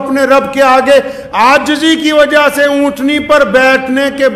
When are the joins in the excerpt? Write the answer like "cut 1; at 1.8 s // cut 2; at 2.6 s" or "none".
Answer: none